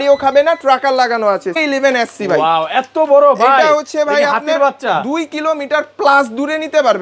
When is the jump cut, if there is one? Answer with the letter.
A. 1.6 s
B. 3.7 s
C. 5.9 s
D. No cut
A